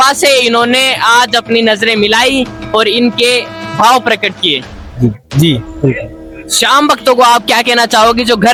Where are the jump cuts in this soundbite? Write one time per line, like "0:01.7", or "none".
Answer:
none

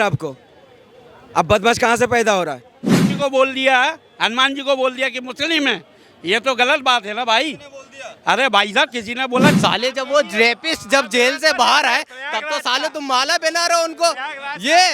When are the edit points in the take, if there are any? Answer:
0:02.9
0:09.6

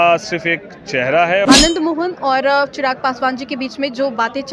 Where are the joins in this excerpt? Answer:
0:01.5

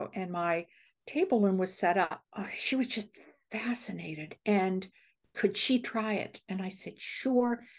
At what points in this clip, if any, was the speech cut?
0:02.2

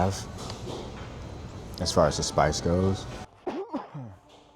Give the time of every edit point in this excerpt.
0:03.3

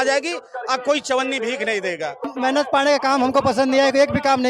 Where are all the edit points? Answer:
0:02.3

